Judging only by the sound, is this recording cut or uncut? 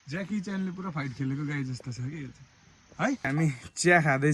cut